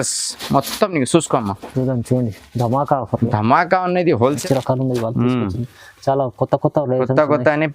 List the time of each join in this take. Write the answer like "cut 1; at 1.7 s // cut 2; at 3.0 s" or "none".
cut 1; at 4.4 s